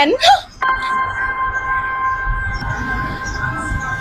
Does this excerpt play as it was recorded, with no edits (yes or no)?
yes